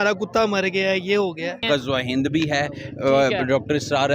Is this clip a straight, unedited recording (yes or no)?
no